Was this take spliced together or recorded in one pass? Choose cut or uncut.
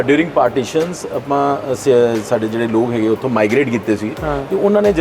uncut